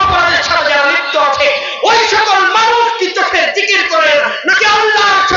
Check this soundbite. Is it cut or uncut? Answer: uncut